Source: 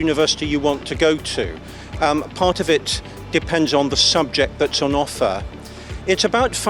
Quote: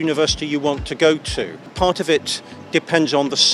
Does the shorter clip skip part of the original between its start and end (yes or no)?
yes